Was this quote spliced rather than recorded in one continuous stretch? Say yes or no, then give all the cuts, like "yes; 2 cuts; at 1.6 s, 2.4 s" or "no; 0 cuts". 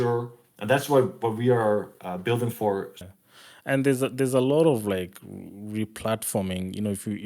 yes; 1 cut; at 3.0 s